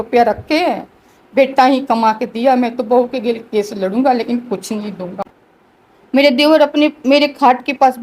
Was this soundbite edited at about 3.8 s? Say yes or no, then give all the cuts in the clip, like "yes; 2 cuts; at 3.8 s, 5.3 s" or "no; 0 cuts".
no; 1 cut; at 5.1 s